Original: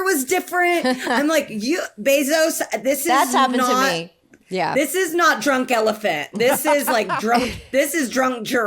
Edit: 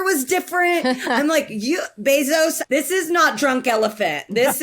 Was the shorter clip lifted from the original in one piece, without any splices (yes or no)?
no